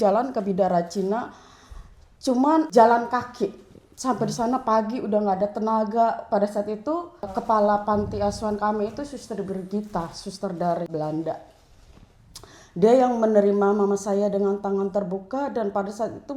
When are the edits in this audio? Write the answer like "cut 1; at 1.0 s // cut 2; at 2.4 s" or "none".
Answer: cut 1; at 2.7 s // cut 2; at 7.4 s // cut 3; at 10.9 s